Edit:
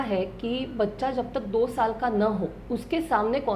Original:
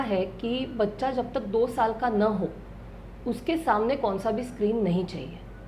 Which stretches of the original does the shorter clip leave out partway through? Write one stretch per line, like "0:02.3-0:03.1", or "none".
0:02.6-0:03.1

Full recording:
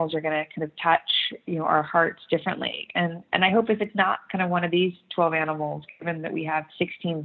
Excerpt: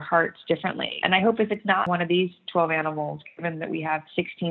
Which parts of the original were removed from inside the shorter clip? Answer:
0:02.7-0:03.2
0:04.2-0:04.5

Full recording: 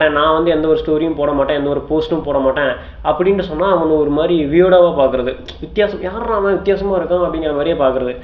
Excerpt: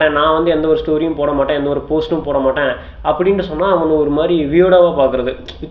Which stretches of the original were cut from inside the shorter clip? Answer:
none

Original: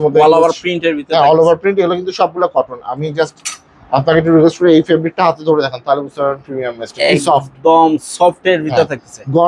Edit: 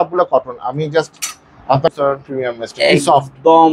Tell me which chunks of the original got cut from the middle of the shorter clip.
0:04.1-0:06.1

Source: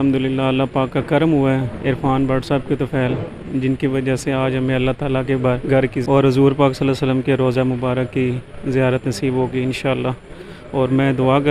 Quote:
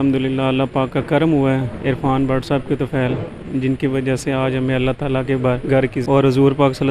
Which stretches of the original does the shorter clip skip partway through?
none

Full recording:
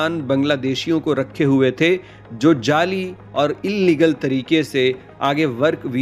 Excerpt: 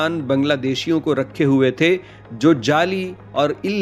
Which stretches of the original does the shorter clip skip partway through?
none

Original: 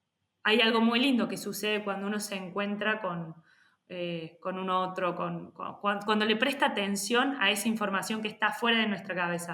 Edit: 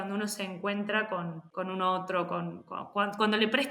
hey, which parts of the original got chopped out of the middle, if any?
0:03.4-0:04.3

